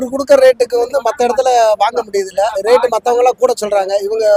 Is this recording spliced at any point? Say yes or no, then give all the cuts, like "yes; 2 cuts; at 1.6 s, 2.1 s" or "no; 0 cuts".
no; 0 cuts